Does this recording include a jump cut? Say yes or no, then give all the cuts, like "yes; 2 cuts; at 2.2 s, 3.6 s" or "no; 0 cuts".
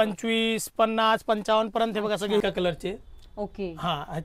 yes; 1 cut; at 2.4 s